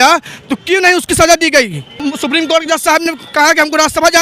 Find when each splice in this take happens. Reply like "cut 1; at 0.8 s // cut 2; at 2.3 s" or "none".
cut 1; at 1.9 s